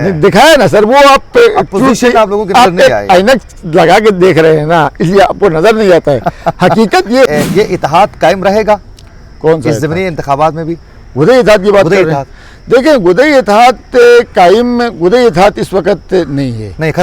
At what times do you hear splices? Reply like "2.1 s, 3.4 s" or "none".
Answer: 7.3 s